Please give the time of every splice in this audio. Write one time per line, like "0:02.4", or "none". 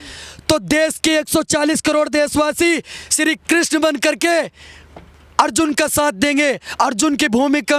none